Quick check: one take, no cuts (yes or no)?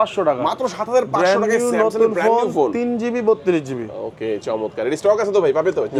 yes